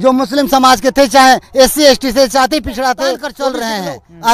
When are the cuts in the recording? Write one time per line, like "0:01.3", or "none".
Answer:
0:03.3